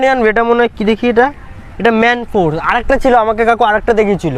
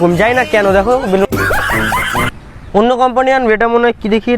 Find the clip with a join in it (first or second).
second